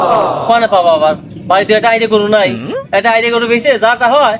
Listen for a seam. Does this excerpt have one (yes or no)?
no